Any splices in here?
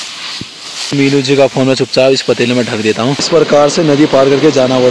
yes; 2 cuts; at 0.9 s, 3.3 s

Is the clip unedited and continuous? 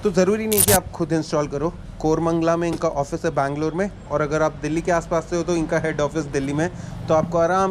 yes; 0 cuts

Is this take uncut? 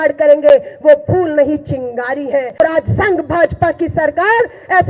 no; 1 cut; at 2.6 s

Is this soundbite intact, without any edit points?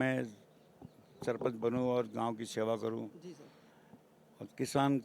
yes; 0 cuts

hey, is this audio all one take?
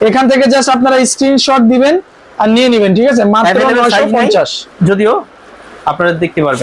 yes; 0 cuts

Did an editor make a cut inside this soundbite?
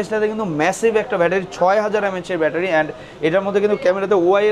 no; 0 cuts

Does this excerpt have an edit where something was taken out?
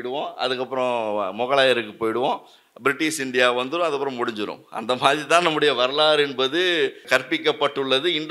yes; 1 cut; at 7.0 s

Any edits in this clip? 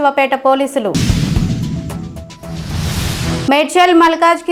no; 0 cuts

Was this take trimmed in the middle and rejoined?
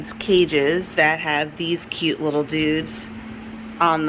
no; 0 cuts

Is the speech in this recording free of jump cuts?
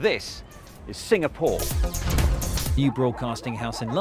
yes; 0 cuts

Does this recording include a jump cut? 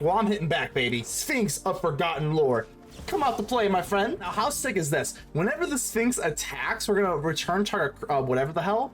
yes; 2 cuts; at 1.1 s, 4.3 s

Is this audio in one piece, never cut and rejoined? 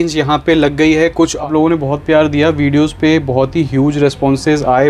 no; 1 cut; at 1.4 s

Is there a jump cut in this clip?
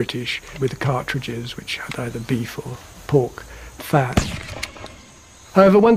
yes; 1 cut; at 4.4 s

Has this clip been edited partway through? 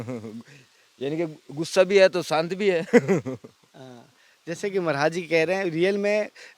no; 0 cuts

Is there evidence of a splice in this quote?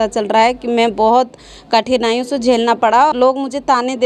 yes; 1 cut; at 3.1 s

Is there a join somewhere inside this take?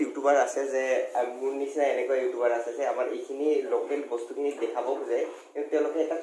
no; 0 cuts

